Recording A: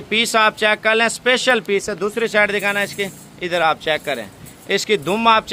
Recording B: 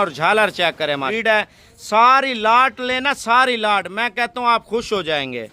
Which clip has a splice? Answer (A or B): B